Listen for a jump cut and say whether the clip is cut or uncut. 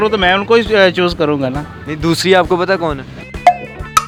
uncut